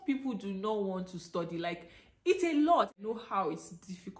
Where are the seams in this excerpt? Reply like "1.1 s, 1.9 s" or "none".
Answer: 3.0 s